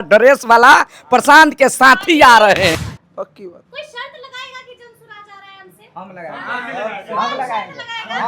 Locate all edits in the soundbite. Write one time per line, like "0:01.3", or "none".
0:02.8